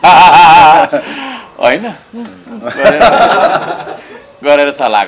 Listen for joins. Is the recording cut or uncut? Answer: uncut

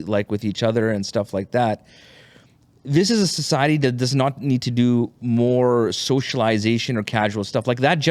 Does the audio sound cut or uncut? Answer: uncut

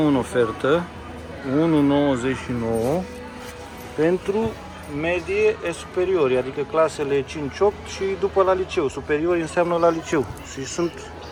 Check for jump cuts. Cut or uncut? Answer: uncut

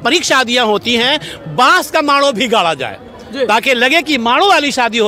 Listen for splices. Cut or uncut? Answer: uncut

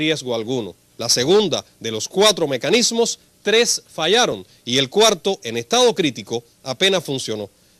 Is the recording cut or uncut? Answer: cut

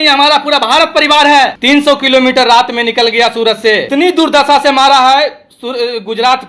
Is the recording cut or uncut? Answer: cut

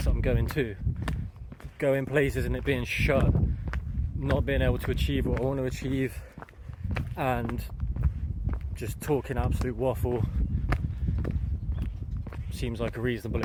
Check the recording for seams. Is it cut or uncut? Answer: uncut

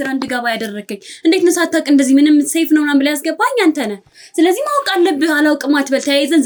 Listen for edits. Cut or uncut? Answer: uncut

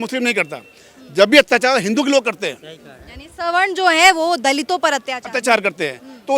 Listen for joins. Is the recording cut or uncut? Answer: uncut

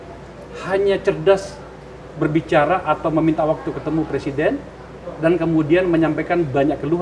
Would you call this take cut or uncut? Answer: uncut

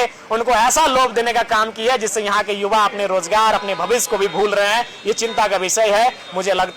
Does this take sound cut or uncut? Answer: uncut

